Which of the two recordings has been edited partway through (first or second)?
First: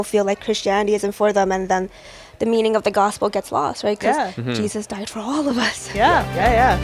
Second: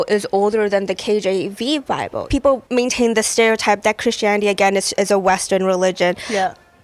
second